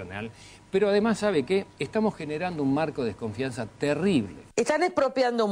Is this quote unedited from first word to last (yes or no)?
yes